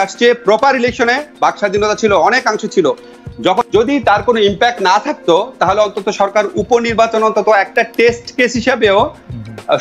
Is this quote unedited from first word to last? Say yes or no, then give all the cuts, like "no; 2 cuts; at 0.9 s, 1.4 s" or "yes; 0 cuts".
no; 1 cut; at 3.7 s